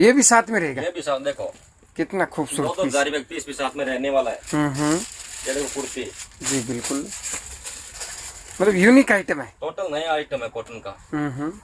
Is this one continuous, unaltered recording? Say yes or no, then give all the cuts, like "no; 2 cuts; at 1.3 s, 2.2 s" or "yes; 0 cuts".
yes; 0 cuts